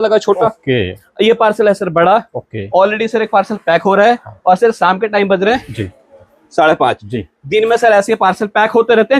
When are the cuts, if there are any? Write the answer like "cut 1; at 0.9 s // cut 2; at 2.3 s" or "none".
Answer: cut 1; at 1.0 s